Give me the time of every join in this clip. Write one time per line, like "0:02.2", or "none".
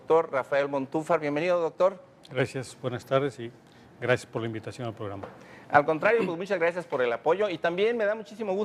0:05.8